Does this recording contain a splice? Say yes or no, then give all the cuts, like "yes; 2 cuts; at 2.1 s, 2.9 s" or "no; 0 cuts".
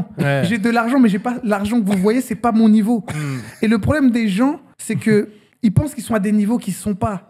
yes; 2 cuts; at 4.7 s, 5.4 s